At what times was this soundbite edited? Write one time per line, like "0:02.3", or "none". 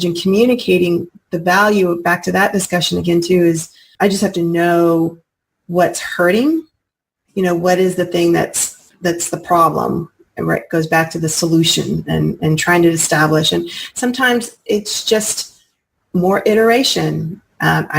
0:03.9